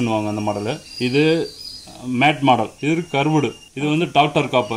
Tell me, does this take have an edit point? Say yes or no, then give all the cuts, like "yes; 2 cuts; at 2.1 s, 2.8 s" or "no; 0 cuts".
yes; 3 cuts; at 0.9 s, 2.7 s, 3.6 s